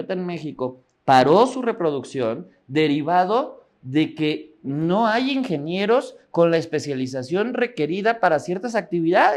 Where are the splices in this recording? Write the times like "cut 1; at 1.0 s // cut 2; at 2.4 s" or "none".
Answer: none